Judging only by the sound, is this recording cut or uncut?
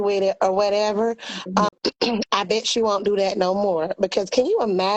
cut